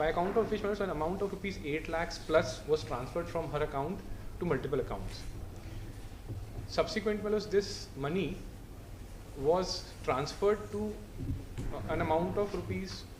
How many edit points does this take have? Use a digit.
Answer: 0